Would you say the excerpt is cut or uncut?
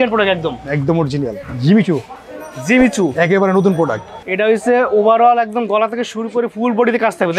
cut